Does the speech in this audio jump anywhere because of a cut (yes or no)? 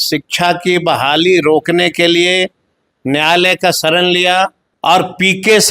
yes